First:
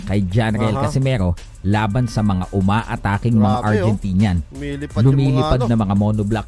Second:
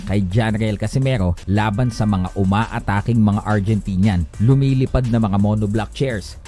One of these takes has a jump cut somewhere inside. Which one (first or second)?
second